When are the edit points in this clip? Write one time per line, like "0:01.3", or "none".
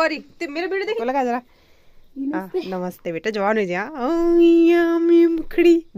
0:01.0